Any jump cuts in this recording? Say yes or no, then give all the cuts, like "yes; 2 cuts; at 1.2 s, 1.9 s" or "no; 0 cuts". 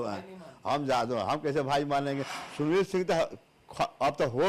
yes; 1 cut; at 2.3 s